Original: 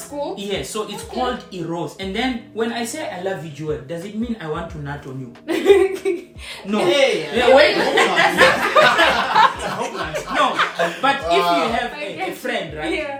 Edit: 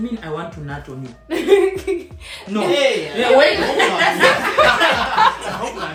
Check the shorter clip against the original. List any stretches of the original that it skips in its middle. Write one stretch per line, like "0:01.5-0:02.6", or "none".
none